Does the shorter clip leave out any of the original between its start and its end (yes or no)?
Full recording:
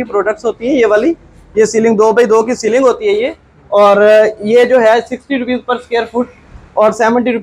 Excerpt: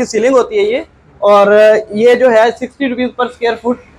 no